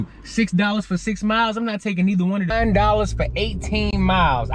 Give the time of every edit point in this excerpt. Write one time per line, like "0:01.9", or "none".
0:02.5

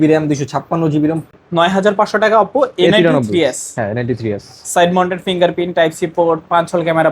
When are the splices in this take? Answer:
0:01.2

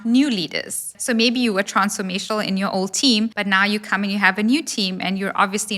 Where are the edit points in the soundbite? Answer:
0:01.0
0:03.4

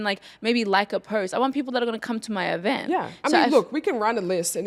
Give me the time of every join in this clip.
none

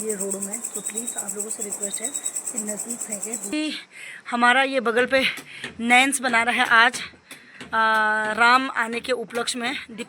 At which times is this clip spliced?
0:03.5

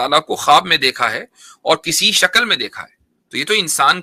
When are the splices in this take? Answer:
none

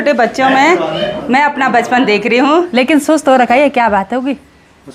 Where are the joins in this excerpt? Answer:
0:02.7

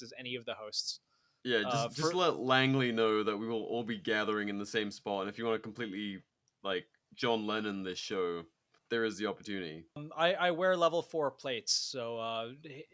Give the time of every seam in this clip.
0:10.1

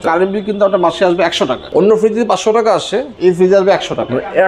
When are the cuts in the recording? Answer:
0:01.6
0:03.1

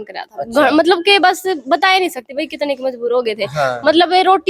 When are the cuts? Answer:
none

